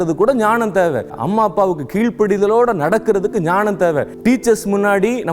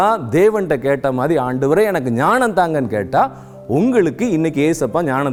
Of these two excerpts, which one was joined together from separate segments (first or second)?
first